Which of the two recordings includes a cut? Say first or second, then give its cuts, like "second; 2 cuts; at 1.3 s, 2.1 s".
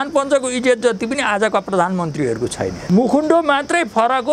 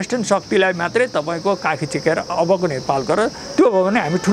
first; 1 cut; at 2.7 s